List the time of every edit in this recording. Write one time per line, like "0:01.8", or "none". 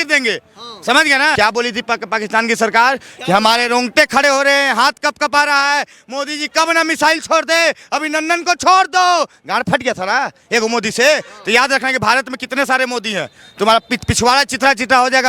0:01.4

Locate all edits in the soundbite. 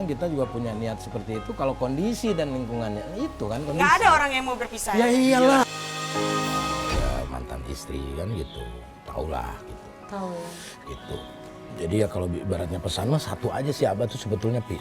0:07.0

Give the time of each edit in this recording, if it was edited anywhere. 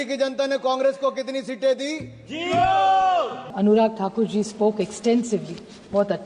0:03.4

